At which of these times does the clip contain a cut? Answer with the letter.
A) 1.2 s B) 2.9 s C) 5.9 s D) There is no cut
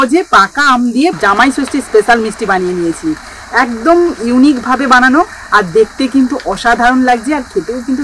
A